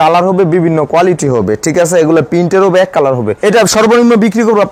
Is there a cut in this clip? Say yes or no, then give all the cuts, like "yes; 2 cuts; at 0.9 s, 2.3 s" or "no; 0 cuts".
yes; 1 cut; at 3.4 s